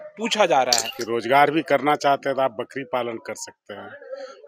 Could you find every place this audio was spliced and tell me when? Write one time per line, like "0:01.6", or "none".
0:00.9